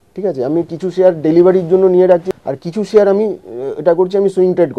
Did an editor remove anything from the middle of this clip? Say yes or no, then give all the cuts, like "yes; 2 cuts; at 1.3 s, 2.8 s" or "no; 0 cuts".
yes; 1 cut; at 2.2 s